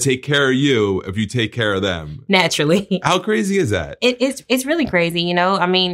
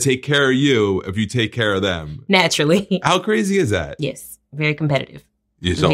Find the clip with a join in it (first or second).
second